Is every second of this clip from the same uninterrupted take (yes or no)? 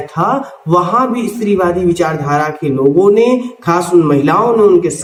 yes